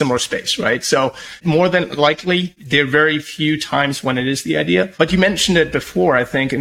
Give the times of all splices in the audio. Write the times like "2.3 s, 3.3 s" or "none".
1.3 s, 2.5 s, 4.9 s